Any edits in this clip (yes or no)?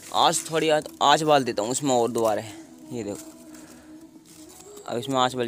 no